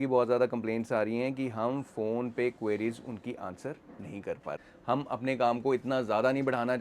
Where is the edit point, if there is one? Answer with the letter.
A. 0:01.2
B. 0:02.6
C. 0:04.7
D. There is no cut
C